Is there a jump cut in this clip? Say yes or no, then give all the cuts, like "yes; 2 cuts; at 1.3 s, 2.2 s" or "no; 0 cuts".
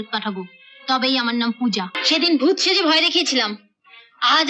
yes; 1 cut; at 2.0 s